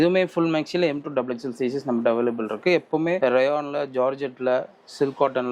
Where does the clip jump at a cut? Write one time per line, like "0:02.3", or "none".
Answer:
none